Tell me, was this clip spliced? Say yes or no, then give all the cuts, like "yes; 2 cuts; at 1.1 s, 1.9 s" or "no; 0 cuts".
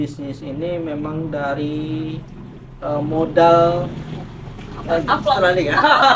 no; 0 cuts